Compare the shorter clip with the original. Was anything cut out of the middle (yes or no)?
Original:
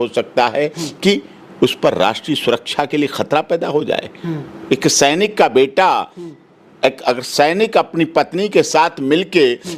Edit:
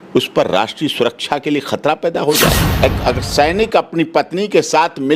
yes